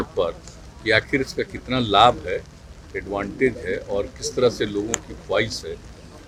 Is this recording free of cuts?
yes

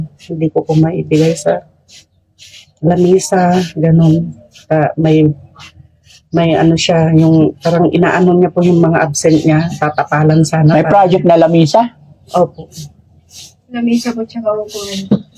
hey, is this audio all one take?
yes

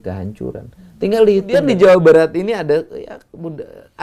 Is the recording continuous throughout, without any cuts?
no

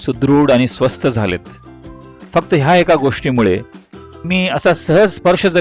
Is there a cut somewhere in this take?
yes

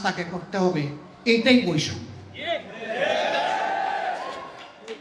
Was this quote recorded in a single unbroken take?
yes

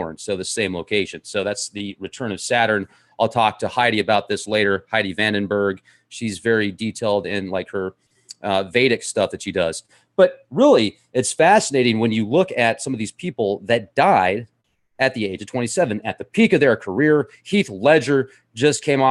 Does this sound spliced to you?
yes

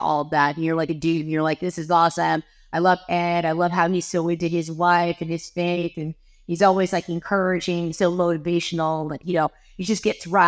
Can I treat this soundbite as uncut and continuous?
yes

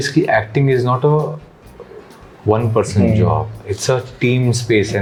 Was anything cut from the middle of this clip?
no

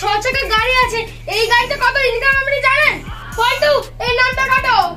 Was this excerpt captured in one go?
yes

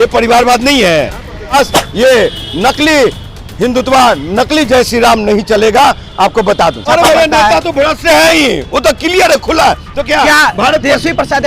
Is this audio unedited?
no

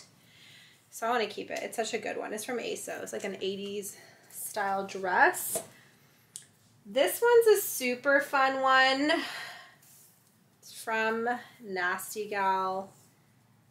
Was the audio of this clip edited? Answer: no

